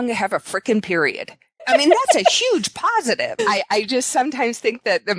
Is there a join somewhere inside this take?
yes; 2 cuts; at 1.7 s, 3.3 s

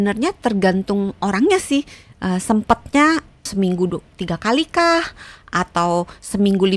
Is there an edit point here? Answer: yes; 1 cut; at 3.4 s

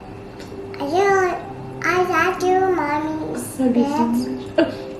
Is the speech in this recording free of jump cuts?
yes; 0 cuts

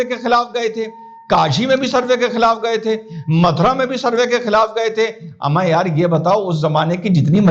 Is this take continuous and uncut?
yes; 0 cuts

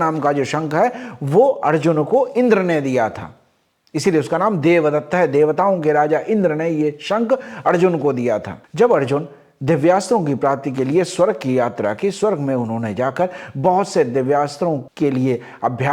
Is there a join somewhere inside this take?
no; 0 cuts

